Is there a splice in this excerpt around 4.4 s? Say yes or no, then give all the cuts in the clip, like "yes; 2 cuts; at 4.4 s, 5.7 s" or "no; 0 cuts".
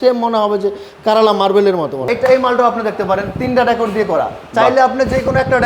no; 1 cut; at 2.1 s